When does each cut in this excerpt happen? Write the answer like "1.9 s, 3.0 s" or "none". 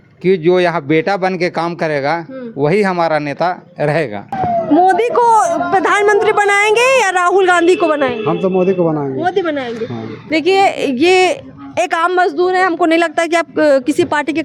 4.3 s, 10.1 s